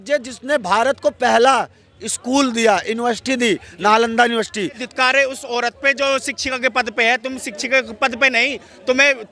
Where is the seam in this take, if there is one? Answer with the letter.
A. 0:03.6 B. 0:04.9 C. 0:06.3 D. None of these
B